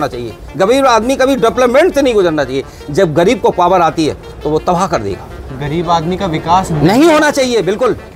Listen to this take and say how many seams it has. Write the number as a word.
zero